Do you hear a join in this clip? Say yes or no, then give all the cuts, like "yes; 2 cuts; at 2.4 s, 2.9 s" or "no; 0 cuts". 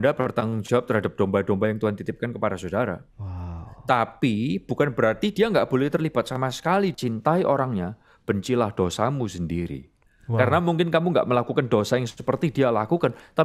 yes; 1 cut; at 6.9 s